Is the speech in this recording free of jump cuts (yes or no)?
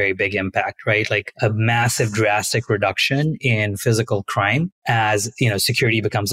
no